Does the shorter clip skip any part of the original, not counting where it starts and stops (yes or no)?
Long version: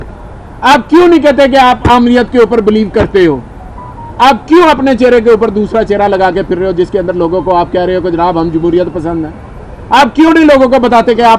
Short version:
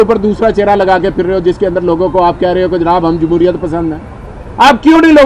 no